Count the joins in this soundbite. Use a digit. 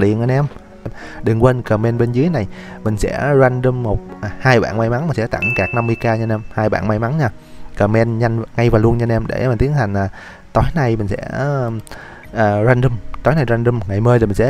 1